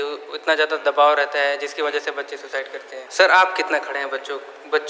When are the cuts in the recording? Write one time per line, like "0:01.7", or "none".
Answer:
0:03.0